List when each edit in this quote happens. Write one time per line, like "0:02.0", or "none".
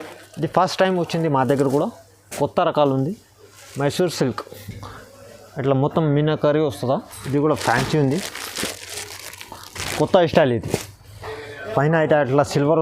0:07.1